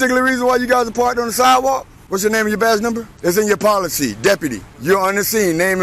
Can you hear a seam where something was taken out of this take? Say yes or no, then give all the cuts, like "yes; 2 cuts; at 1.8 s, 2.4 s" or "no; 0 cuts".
yes; 3 cuts; at 2.0 s, 3.1 s, 4.7 s